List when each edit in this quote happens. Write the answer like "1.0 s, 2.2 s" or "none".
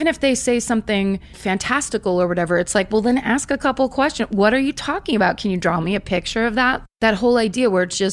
1.4 s, 6.8 s